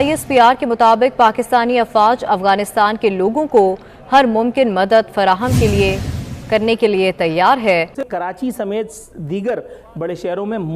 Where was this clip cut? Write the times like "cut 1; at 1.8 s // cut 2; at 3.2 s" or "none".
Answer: cut 1; at 8.0 s